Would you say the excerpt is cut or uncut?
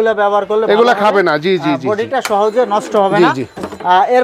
uncut